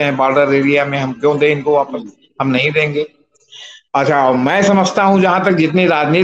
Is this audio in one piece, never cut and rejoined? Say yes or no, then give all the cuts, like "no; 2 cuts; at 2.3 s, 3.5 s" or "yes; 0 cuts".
yes; 0 cuts